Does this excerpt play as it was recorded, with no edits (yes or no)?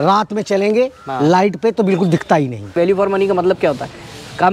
no